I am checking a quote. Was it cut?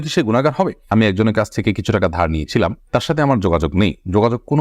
yes; 1 cut; at 0.9 s

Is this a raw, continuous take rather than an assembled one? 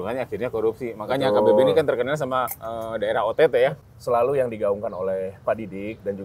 no; 1 cut; at 3.8 s

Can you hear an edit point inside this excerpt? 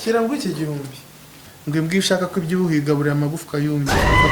yes; 1 cut; at 1.5 s

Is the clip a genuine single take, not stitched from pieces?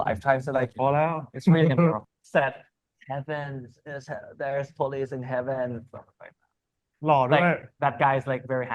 no; 1 cut; at 2.0 s

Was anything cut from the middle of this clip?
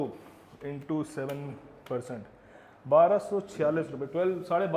no; 0 cuts

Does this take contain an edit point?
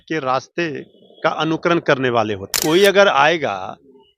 yes; 1 cut; at 2.6 s

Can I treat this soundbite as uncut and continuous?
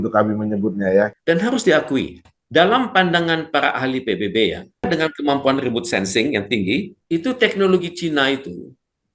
no; 3 cuts; at 1.1 s, 4.9 s, 7.0 s

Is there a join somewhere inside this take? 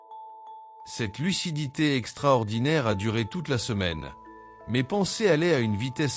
yes; 1 cut; at 1.0 s

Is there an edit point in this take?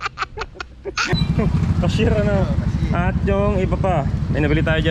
no; 0 cuts

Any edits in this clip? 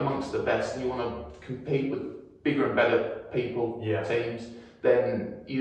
no; 0 cuts

